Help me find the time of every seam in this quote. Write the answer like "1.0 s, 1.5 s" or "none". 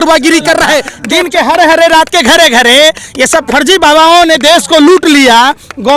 1.0 s

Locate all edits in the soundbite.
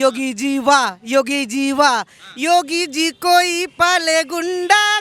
none

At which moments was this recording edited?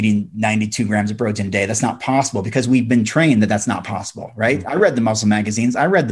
none

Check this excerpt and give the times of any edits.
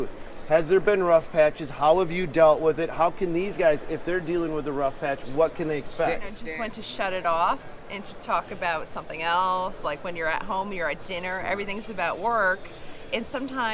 6.3 s

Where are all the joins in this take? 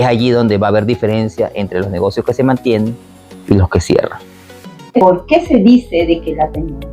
5.0 s

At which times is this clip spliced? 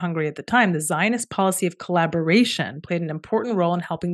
none

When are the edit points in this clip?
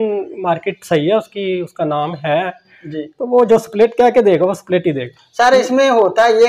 none

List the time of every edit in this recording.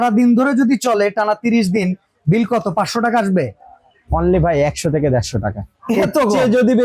none

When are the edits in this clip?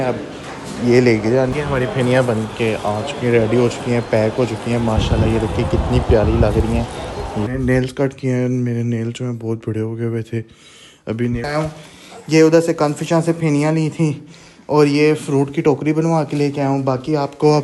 1.5 s, 7.5 s, 11.4 s

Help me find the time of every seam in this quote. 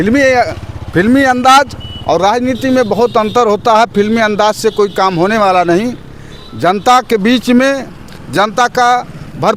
none

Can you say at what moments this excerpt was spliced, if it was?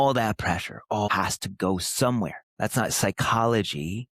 1.1 s, 2.4 s

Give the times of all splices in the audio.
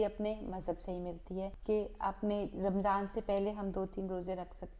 1.6 s

